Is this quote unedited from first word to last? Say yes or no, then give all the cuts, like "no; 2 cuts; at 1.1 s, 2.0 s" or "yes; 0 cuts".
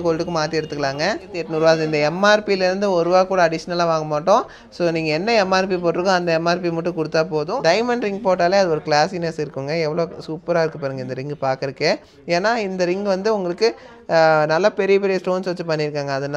no; 2 cuts; at 1.4 s, 7.5 s